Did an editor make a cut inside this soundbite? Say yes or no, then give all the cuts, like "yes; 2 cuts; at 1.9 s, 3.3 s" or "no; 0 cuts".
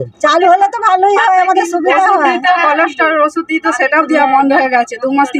no; 0 cuts